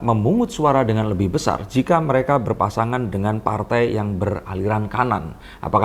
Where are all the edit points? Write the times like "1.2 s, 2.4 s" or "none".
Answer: none